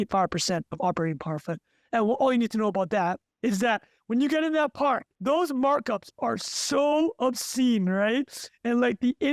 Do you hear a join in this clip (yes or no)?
yes